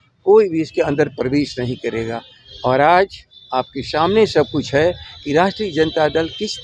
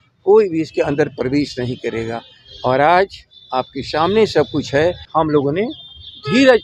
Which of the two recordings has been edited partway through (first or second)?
second